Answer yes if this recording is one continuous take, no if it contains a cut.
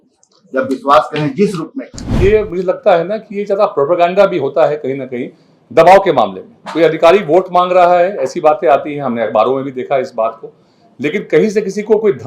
no